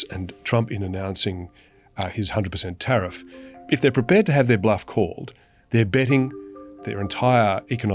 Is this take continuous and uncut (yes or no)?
yes